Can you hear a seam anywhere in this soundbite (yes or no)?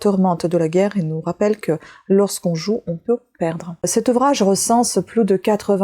yes